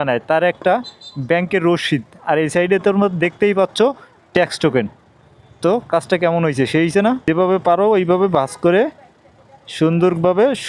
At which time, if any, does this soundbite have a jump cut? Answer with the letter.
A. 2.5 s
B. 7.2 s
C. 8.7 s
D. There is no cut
B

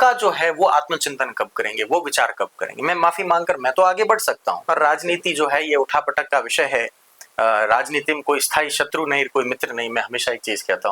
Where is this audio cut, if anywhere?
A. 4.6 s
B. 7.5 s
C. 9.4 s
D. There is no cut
A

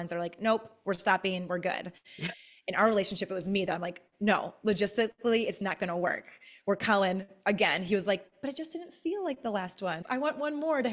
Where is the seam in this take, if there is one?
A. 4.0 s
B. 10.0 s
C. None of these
B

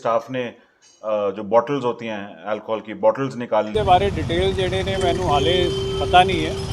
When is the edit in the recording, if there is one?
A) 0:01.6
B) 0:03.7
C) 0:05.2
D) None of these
B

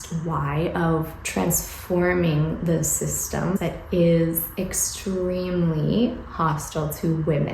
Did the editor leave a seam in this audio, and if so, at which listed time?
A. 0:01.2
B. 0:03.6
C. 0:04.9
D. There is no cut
B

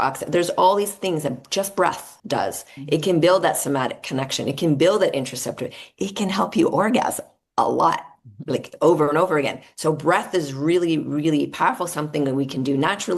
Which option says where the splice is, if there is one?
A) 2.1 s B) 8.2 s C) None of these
A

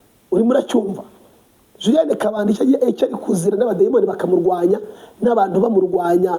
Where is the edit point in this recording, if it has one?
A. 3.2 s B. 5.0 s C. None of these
C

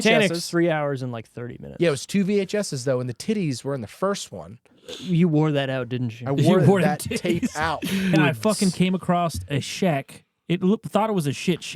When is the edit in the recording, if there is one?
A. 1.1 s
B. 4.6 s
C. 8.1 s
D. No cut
C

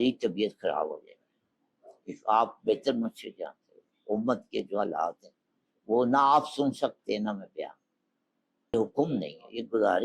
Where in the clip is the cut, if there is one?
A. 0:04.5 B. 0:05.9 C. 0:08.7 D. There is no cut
C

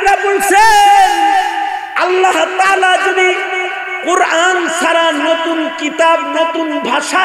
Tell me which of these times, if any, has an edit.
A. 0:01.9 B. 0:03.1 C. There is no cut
A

